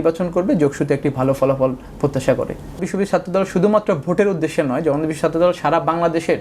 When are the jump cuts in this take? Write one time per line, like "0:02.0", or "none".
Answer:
0:02.8